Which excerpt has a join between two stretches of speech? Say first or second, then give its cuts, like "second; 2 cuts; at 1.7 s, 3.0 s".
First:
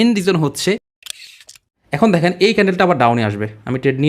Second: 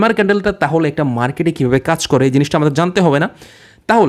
first; 1 cut; at 1.2 s